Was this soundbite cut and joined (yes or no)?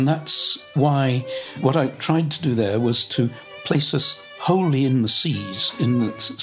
yes